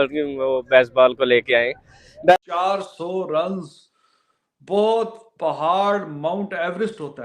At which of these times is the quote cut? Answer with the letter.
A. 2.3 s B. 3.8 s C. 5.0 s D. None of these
A